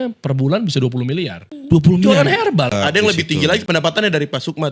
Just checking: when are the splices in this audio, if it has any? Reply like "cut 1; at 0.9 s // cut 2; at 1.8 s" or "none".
cut 1; at 1.5 s // cut 2; at 2.7 s